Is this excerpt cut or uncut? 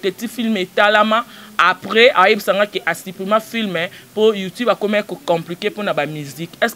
uncut